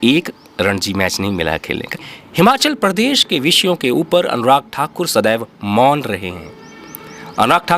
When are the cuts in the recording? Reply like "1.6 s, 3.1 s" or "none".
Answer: 2.0 s